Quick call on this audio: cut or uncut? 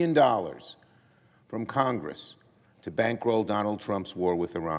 uncut